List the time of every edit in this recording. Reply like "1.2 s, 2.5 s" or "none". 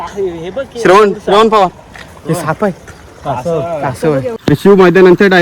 4.3 s